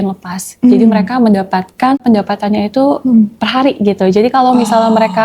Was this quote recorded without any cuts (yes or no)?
no